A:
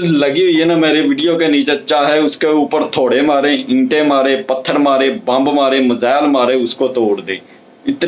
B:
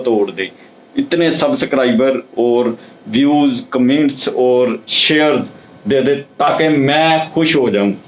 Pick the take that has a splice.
A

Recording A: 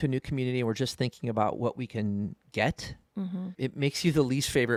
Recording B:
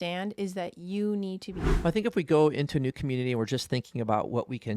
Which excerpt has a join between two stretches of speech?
B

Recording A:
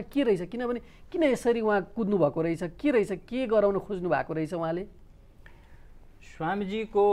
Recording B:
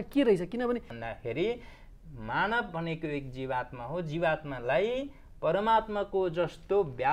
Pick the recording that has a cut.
B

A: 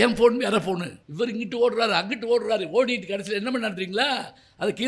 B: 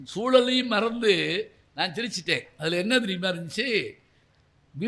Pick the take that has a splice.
A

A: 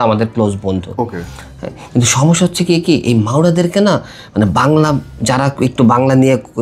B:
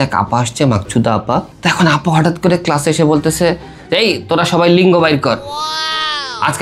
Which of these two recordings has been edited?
B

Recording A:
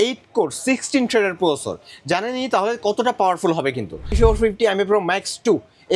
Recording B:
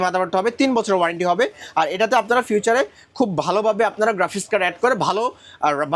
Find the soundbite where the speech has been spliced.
A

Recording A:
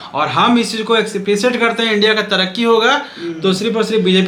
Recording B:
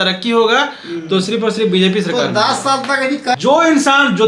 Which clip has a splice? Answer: B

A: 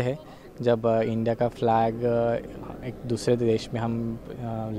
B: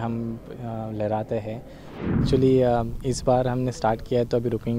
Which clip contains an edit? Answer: B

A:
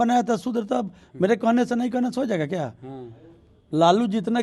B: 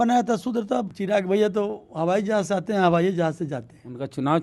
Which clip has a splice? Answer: B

